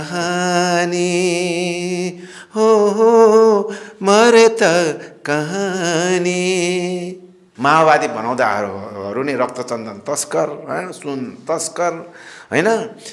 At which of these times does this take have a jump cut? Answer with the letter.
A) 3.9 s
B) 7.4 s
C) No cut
B